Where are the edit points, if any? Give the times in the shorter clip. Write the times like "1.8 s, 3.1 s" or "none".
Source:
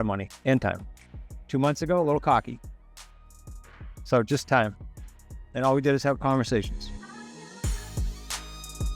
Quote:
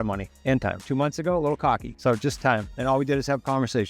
0.8 s, 1.9 s, 2.7 s